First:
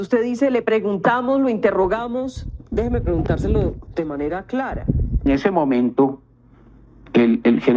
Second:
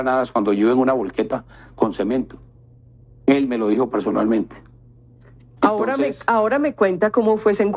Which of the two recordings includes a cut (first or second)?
first